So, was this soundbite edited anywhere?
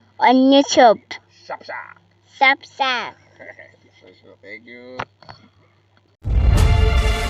no; 0 cuts

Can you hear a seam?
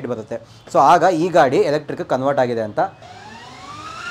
yes; 1 cut; at 2.9 s

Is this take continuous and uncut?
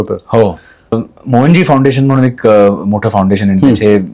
no; 1 cut; at 1.1 s

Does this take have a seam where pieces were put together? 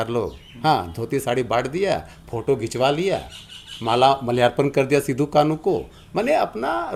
no; 0 cuts

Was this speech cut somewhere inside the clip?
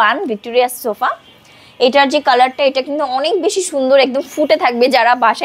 no; 0 cuts

